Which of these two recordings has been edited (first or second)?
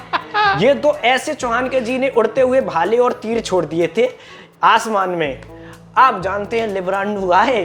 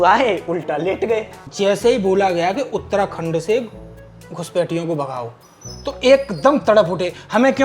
second